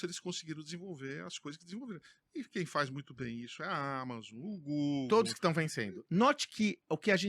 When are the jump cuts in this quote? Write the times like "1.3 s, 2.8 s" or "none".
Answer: 6.0 s